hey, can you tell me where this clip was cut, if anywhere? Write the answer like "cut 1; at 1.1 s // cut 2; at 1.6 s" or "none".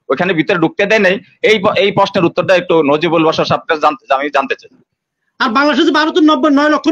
cut 1; at 4.9 s